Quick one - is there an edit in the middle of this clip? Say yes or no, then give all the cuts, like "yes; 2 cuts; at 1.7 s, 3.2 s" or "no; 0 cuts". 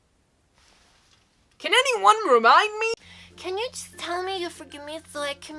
yes; 1 cut; at 3.0 s